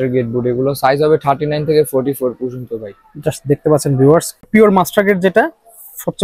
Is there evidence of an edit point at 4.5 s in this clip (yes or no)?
yes